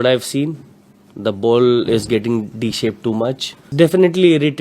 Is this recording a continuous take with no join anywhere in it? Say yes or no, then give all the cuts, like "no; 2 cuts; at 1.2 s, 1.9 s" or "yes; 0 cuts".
no; 1 cut; at 3.7 s